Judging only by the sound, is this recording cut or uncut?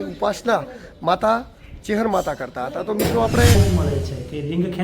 cut